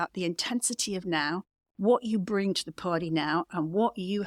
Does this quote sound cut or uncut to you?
uncut